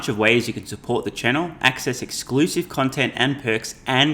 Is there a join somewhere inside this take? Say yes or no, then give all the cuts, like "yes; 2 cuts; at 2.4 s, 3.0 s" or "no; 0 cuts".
no; 0 cuts